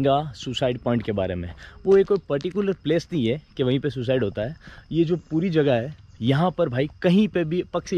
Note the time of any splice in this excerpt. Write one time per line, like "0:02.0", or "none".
none